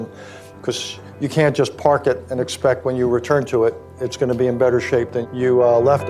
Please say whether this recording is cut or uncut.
cut